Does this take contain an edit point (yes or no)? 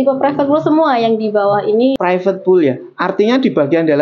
yes